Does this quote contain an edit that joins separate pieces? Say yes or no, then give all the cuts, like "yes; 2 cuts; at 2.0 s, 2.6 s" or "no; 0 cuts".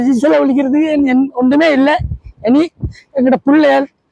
no; 0 cuts